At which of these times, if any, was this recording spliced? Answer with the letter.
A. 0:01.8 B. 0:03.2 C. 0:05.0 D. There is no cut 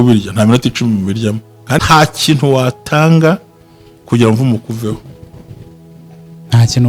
A